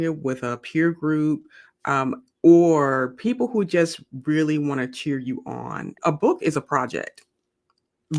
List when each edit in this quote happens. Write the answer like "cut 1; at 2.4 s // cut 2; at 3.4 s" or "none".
cut 1; at 6.0 s